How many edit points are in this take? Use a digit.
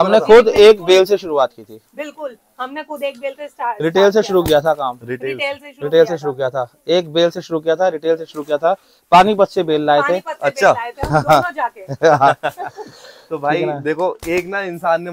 0